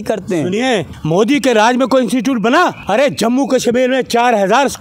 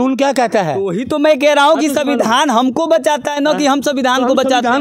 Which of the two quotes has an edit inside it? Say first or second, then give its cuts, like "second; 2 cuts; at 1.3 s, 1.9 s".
first; 2 cuts; at 0.9 s, 2.8 s